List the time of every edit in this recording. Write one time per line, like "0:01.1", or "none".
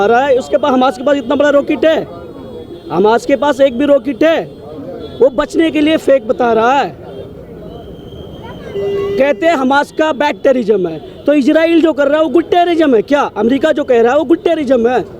none